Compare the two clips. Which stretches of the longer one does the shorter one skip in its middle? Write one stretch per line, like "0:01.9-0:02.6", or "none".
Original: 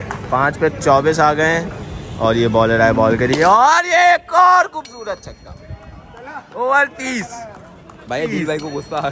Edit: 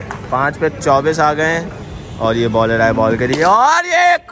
none

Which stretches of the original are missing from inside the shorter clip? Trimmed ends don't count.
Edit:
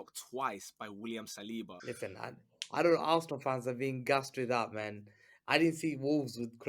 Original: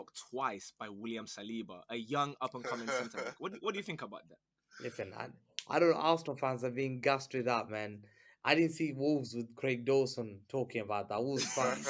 0:01.8-0:04.7

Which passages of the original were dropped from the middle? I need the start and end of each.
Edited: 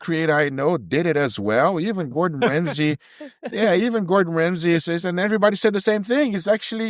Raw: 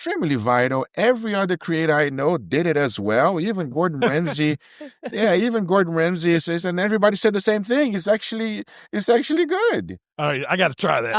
none

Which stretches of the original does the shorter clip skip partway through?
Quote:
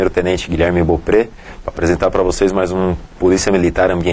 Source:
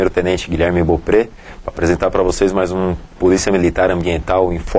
none

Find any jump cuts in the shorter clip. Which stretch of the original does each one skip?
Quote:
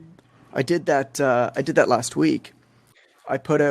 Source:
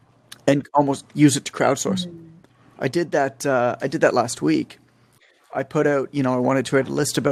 none

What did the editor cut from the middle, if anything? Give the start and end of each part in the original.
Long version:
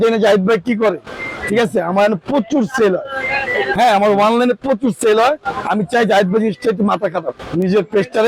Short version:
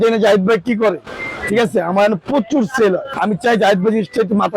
0:03.1-0:05.6

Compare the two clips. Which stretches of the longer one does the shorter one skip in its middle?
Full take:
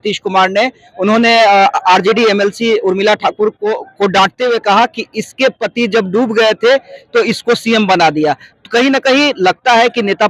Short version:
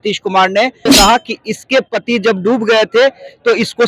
0:00.9-0:04.6

